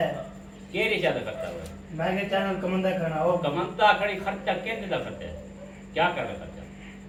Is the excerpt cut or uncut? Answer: uncut